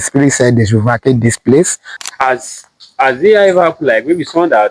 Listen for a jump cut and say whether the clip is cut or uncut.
cut